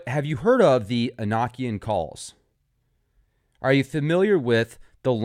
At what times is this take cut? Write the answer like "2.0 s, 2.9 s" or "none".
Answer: 2.1 s